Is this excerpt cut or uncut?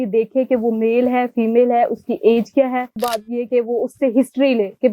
cut